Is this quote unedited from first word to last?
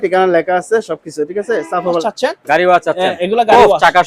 no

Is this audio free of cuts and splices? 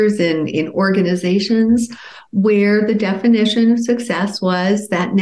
yes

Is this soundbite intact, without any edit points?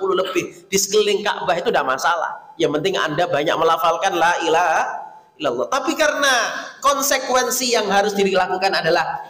yes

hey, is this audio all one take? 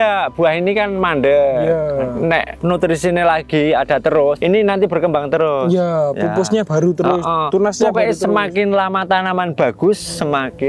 yes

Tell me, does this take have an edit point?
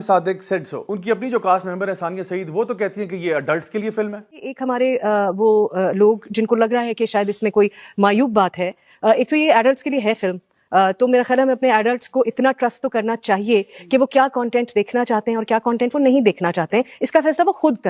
yes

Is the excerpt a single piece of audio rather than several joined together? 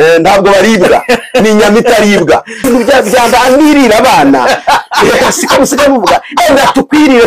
no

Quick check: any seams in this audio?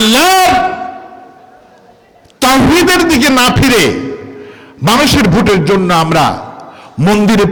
no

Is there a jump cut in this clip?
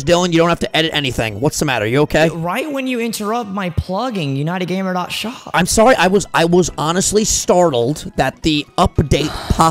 no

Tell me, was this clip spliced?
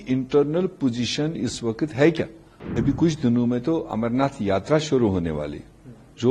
yes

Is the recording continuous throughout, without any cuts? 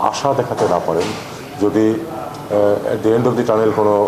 yes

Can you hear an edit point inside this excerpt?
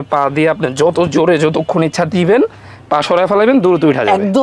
no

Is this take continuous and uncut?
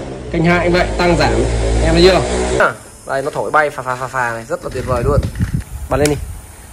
no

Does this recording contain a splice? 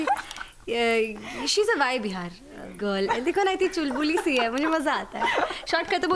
yes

